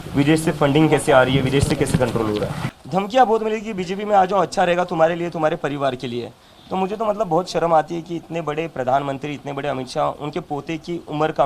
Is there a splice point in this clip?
yes; 1 cut; at 2.7 s

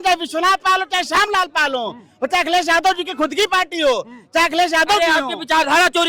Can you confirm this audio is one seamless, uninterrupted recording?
yes; 0 cuts

